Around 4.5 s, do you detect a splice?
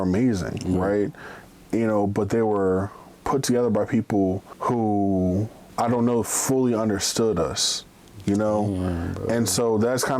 yes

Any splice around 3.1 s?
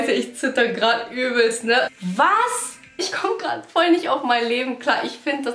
yes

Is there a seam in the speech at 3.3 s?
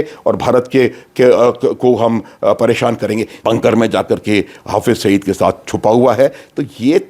yes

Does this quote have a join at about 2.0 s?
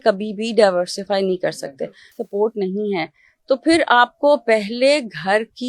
yes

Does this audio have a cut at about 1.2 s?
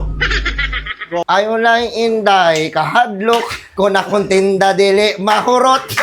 yes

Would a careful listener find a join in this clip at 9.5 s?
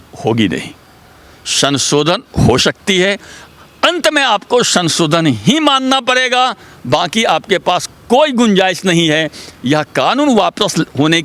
no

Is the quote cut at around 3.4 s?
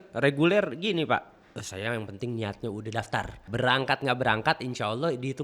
yes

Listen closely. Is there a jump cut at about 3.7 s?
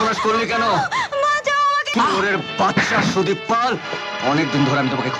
no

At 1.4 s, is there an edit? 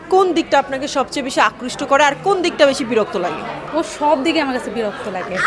no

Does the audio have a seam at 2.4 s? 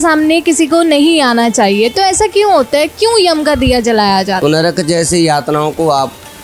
no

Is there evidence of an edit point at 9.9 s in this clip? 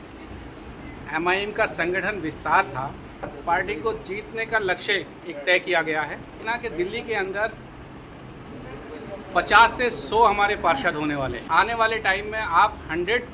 no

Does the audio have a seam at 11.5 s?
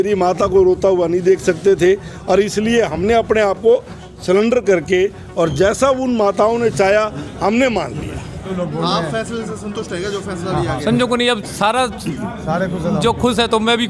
no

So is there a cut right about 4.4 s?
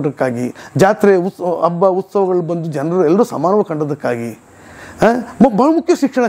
no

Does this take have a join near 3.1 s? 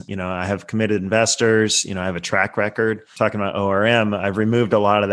yes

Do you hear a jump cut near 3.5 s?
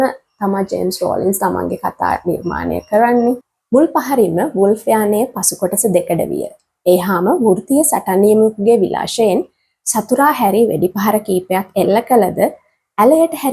yes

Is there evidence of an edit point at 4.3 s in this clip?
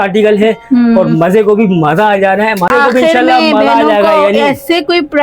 no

